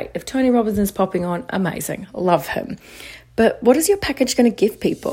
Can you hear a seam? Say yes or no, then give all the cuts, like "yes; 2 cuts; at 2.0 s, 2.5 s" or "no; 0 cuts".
no; 0 cuts